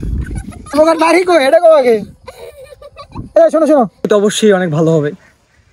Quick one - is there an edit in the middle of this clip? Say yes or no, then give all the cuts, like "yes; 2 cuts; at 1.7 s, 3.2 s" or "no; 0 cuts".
yes; 1 cut; at 4.1 s